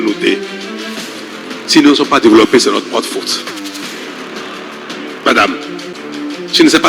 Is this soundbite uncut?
no; 2 cuts; at 3.3 s, 4.6 s

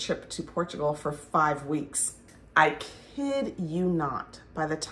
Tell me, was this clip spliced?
yes; 1 cut; at 2.2 s

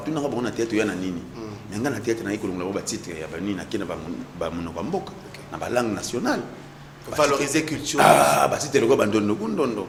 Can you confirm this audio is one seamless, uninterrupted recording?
yes; 0 cuts

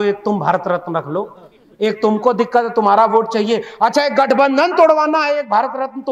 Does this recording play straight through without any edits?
yes; 0 cuts

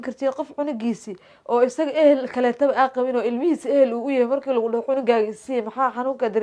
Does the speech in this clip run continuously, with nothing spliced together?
yes; 0 cuts

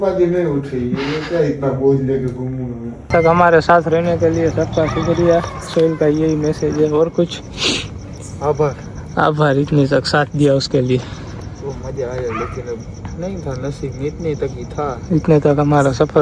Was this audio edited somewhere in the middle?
yes; 1 cut; at 3.1 s

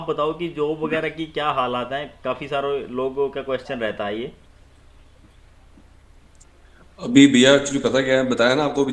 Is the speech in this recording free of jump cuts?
yes; 0 cuts

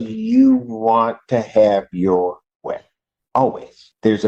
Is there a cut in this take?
no; 0 cuts

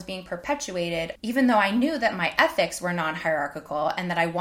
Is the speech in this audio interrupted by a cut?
yes; 1 cut; at 1.2 s

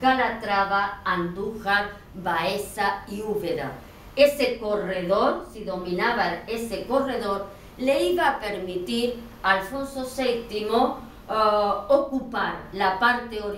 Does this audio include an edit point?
yes; 1 cut; at 1.8 s

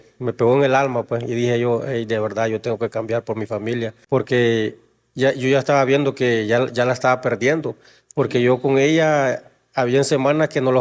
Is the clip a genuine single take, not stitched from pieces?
no; 1 cut; at 4.0 s

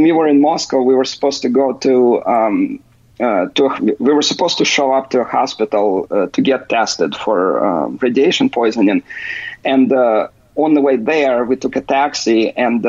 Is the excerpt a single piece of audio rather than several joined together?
yes; 0 cuts

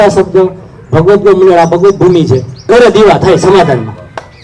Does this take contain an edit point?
yes; 1 cut; at 2.7 s

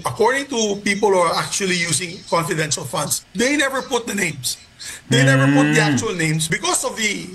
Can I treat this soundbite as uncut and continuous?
no; 2 cuts; at 3.2 s, 6.4 s

